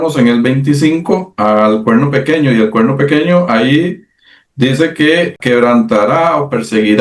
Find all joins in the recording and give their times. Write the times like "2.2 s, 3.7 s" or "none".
5.4 s